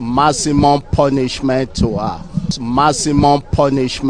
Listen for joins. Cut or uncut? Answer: cut